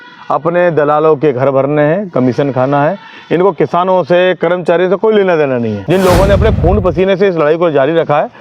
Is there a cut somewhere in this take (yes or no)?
yes